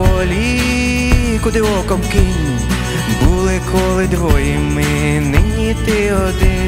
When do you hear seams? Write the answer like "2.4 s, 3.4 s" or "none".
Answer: none